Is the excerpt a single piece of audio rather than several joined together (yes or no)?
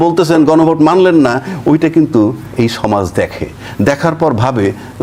yes